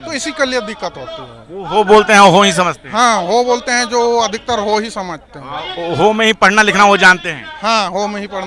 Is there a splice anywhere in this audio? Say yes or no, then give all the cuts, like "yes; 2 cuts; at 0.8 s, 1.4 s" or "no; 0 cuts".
no; 0 cuts